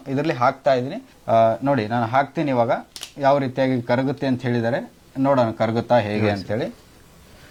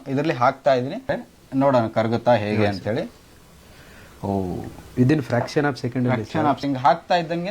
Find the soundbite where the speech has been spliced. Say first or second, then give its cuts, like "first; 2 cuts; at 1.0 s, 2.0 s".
second; 2 cuts; at 1.2 s, 6.6 s